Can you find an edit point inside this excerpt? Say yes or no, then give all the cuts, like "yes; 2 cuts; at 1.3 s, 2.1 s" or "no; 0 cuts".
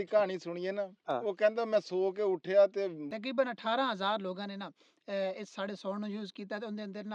yes; 1 cut; at 3.0 s